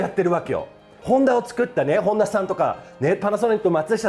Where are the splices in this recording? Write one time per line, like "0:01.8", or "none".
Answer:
0:00.9